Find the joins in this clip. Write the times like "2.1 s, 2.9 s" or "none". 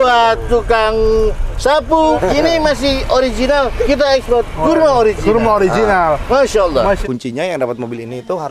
2.2 s, 7.0 s